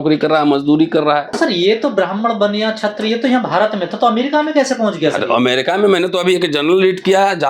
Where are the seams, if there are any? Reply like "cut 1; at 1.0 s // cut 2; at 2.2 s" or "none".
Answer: cut 1; at 1.3 s